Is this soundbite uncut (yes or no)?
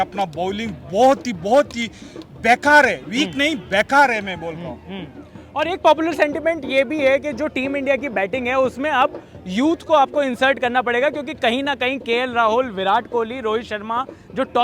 yes